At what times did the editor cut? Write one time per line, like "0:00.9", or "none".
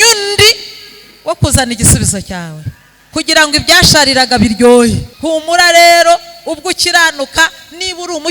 0:05.1